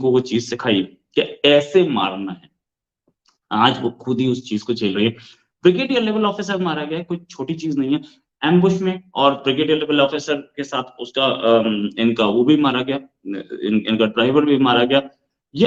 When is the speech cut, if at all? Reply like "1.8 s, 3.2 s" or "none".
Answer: none

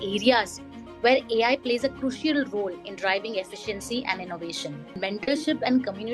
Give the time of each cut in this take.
4.9 s

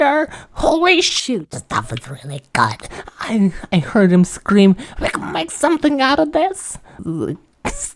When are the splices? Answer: 7.0 s

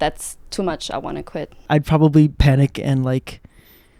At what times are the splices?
1.7 s

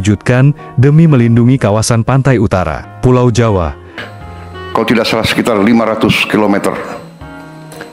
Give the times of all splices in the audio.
3.9 s

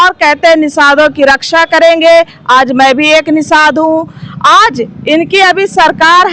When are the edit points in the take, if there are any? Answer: none

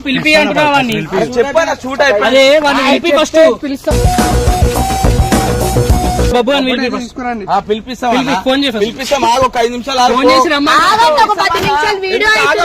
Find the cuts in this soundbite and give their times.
6.3 s

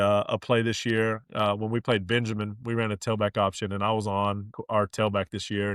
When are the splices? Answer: 4.5 s

